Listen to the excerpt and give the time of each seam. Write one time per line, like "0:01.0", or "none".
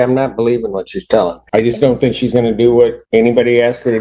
0:01.4
0:03.0